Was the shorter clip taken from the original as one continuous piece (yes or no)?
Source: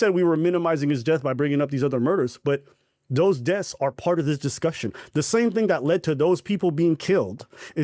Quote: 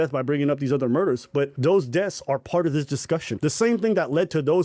no